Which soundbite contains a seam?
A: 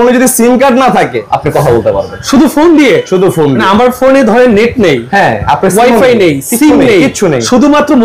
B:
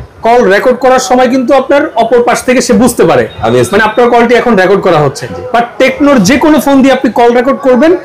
A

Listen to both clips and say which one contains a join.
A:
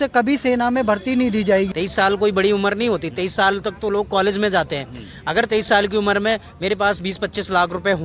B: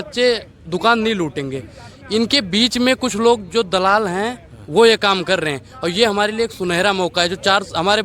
A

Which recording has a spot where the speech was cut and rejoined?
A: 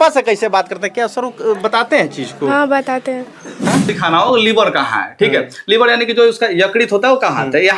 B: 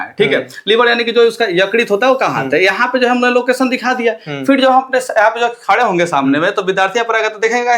A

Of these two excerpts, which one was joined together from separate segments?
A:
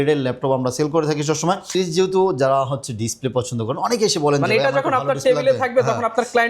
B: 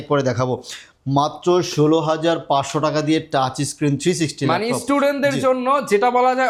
A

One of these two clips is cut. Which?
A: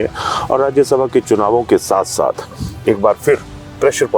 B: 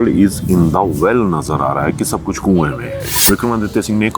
B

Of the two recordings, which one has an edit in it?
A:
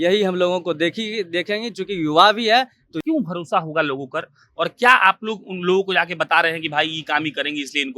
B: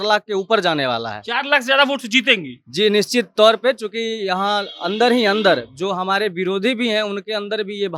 A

